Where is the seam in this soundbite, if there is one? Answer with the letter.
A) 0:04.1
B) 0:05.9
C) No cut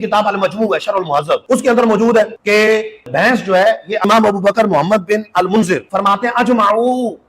A